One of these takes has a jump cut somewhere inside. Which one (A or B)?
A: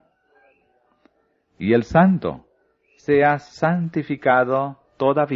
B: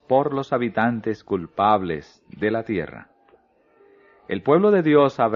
B